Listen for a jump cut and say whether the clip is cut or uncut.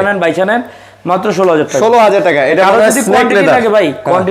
uncut